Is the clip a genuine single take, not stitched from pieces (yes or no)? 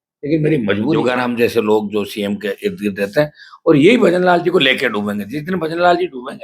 no